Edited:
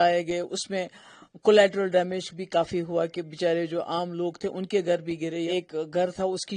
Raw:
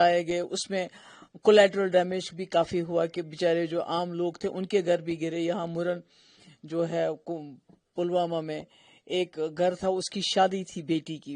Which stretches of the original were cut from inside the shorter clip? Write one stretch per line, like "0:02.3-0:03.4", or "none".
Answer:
0:05.5-0:09.1

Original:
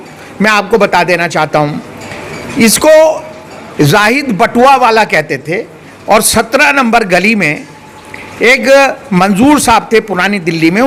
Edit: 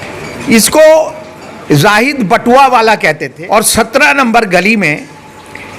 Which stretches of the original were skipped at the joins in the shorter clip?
0:05.4-0:05.9

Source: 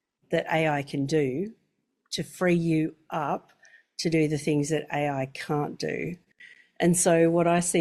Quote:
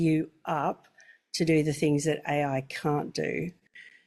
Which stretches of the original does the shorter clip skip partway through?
none

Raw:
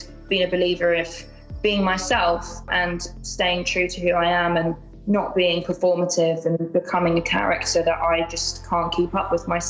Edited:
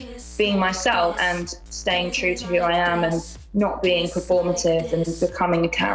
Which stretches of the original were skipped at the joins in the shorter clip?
0:02.4-0:02.7

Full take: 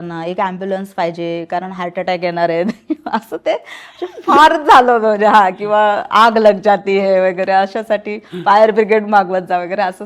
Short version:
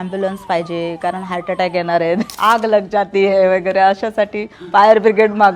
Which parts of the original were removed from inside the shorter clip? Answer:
0:02.8-0:06.0

